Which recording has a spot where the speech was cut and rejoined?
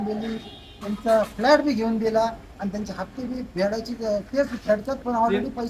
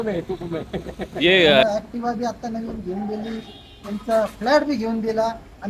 second; 1 cut; at 1.6 s

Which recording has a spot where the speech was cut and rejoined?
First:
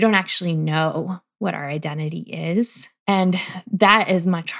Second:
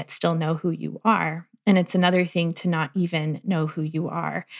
first; 1 cut; at 3.1 s

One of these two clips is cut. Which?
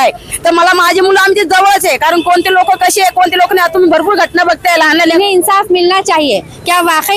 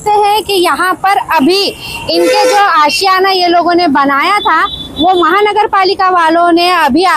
first; 1 cut; at 5.1 s

